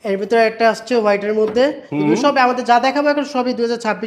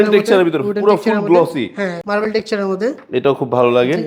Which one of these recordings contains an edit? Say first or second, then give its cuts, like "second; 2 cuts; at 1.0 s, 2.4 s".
second; 1 cut; at 2.0 s